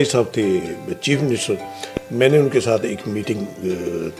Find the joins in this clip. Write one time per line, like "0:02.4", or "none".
none